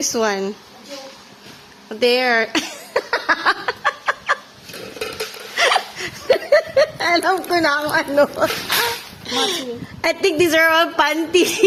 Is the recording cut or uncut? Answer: uncut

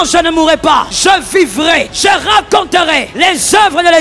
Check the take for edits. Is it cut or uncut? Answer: cut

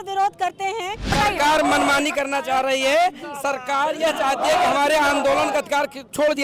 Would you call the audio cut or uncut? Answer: cut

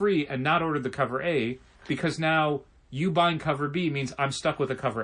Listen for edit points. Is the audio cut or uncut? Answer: cut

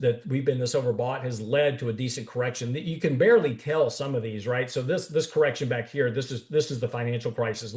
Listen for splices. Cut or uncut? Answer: uncut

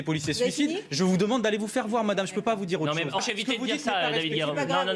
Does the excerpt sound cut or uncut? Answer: uncut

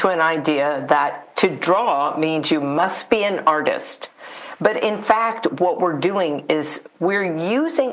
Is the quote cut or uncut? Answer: uncut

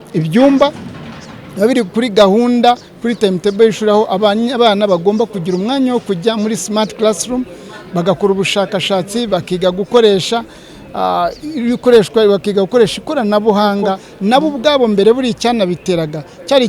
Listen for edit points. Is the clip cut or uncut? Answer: cut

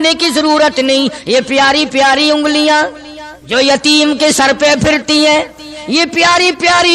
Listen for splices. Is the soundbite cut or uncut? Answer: uncut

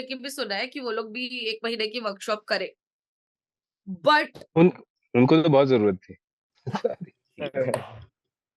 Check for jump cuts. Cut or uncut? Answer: uncut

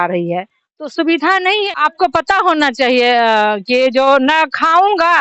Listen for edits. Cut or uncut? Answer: cut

